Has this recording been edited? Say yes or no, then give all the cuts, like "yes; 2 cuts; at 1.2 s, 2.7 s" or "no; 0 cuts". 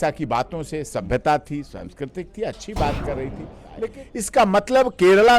yes; 1 cut; at 3.9 s